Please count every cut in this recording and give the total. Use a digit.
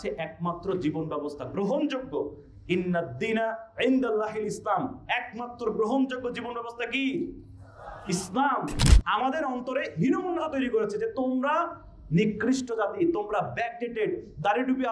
1